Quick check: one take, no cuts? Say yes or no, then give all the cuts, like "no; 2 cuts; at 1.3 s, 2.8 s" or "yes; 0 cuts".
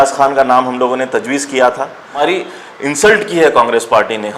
no; 1 cut; at 2.2 s